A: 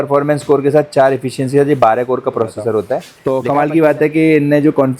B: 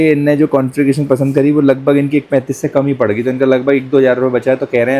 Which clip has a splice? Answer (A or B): A